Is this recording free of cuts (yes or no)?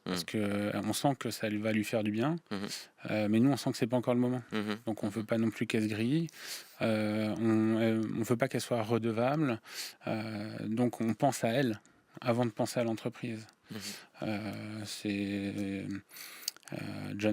yes